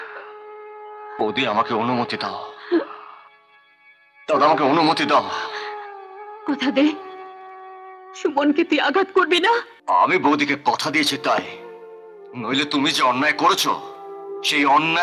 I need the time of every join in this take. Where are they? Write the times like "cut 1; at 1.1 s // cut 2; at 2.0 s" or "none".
cut 1; at 9.7 s